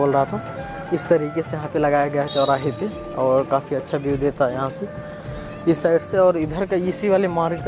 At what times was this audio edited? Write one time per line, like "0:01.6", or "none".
none